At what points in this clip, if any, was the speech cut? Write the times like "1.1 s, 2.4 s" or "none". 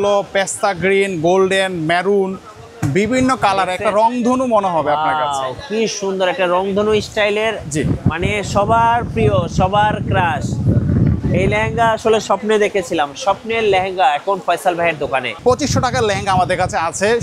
15.4 s